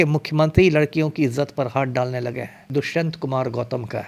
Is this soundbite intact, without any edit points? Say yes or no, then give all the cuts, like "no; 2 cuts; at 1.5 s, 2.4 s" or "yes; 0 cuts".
no; 1 cut; at 2.7 s